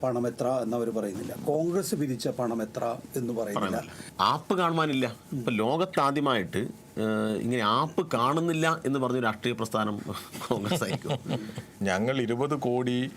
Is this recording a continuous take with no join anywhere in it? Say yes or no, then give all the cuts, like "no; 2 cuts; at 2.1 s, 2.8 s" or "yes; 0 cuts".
no; 2 cuts; at 4.0 s, 11.7 s